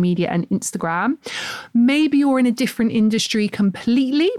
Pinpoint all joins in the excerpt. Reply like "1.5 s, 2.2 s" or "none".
none